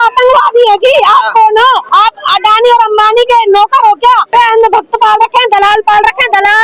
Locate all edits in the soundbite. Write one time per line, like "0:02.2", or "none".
0:01.8
0:04.3